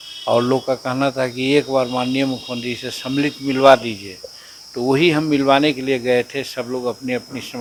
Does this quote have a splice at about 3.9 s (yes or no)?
no